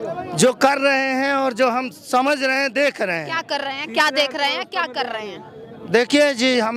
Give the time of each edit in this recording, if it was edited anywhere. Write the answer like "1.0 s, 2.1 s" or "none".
none